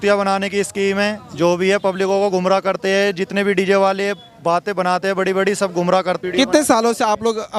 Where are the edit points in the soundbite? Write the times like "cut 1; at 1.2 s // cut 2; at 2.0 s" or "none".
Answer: none